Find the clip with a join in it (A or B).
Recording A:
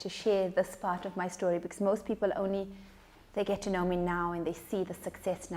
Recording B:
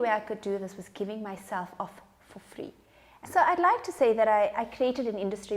B